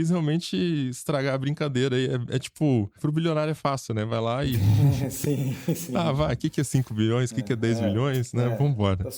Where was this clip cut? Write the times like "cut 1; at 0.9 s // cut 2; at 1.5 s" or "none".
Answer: none